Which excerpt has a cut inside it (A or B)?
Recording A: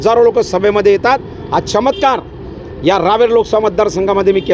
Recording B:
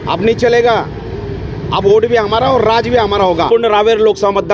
B